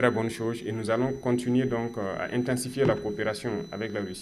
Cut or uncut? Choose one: uncut